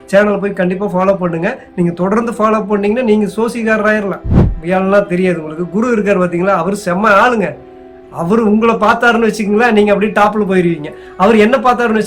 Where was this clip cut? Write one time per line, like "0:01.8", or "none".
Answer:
0:04.5